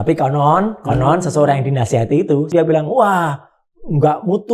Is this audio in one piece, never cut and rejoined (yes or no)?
no